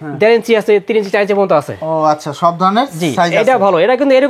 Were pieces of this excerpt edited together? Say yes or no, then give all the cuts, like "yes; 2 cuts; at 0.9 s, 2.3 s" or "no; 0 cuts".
no; 0 cuts